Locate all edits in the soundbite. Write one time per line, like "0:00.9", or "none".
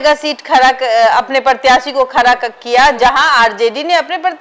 none